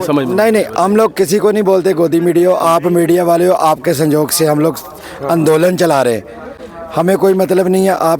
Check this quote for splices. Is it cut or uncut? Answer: uncut